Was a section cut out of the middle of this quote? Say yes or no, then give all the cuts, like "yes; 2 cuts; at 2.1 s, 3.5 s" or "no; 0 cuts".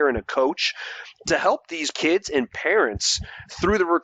yes; 1 cut; at 1.8 s